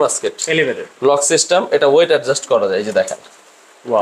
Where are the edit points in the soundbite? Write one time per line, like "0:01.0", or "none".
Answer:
none

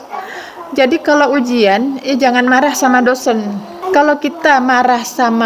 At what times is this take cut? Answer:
0:03.7

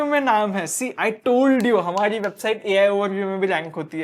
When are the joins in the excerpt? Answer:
none

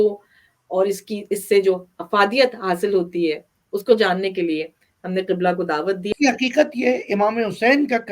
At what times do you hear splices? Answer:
0:06.1

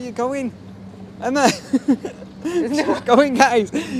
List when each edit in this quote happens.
none

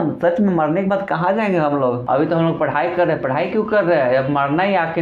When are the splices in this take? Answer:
0:02.0

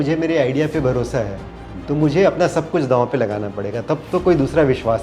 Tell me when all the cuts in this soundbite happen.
none

